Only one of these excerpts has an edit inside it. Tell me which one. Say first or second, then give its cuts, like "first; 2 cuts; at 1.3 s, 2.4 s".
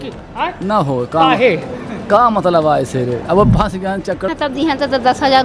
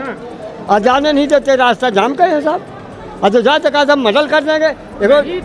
first; 1 cut; at 4.3 s